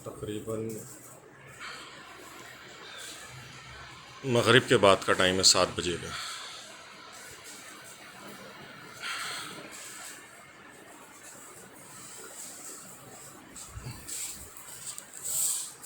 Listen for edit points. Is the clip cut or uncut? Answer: uncut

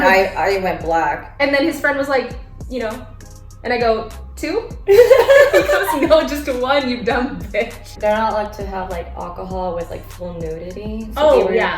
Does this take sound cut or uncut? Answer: cut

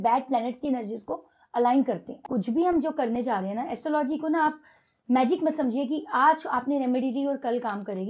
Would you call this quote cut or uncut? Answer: cut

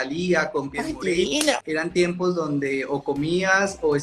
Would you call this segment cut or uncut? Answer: cut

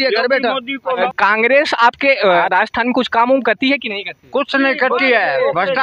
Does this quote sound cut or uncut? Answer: cut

